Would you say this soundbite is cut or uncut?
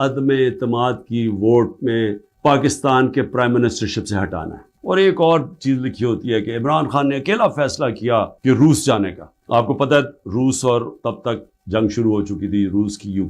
uncut